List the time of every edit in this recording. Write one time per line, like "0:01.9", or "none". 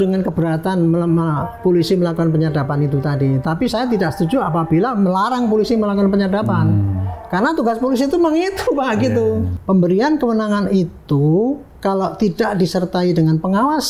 0:09.5